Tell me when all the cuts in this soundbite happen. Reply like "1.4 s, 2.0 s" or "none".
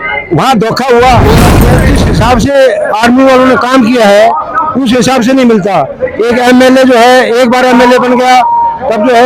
1.6 s